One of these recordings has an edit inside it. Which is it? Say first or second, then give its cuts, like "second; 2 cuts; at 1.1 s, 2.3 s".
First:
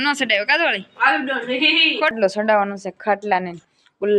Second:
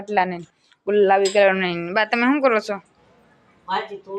first; 1 cut; at 2.1 s